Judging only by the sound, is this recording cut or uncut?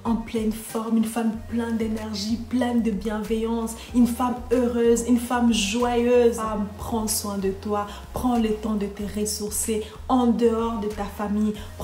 cut